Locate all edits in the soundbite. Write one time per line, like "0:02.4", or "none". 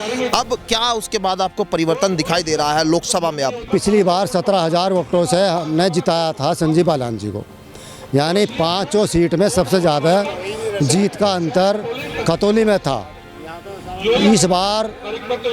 0:03.7